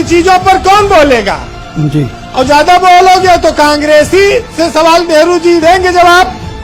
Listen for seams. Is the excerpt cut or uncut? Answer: uncut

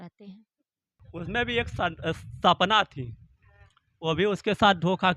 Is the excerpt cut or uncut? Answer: cut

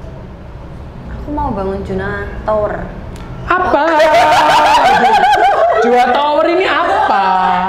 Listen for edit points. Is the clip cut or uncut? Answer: uncut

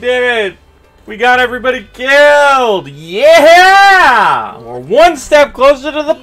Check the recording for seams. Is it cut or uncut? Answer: uncut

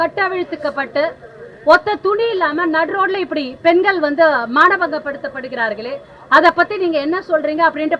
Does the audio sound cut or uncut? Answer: uncut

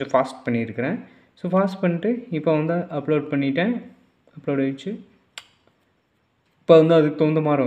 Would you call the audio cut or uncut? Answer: uncut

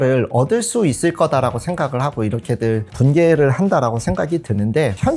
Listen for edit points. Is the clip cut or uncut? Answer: uncut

